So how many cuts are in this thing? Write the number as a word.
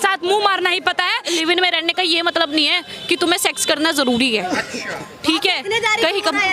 two